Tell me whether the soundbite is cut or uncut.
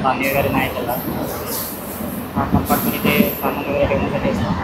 uncut